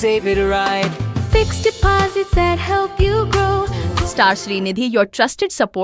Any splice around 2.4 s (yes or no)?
no